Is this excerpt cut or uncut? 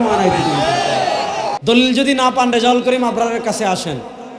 cut